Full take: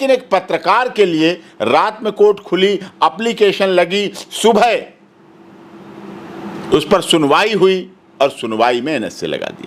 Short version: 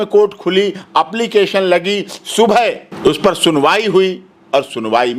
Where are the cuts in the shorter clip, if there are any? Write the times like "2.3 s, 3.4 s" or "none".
2.9 s